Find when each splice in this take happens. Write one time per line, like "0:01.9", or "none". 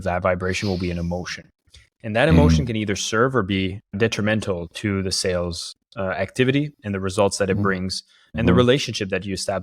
none